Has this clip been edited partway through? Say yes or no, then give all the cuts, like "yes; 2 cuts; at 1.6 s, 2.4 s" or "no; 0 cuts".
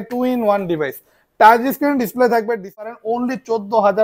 yes; 1 cut; at 2.9 s